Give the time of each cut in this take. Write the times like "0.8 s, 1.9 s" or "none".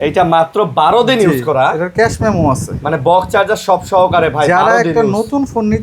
none